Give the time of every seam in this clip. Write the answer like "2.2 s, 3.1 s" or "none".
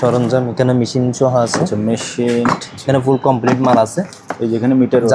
2.6 s